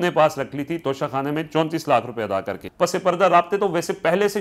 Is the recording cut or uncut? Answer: cut